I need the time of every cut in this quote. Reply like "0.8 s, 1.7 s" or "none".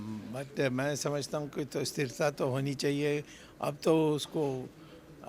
none